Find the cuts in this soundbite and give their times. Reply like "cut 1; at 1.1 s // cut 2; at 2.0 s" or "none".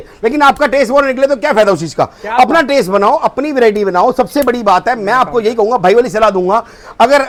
none